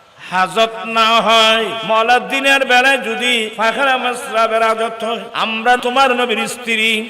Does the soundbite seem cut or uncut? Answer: cut